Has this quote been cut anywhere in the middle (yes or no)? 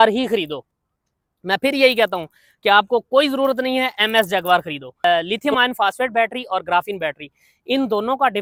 no